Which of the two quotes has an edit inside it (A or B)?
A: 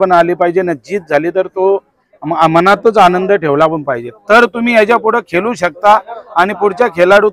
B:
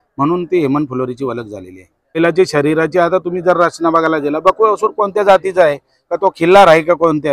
B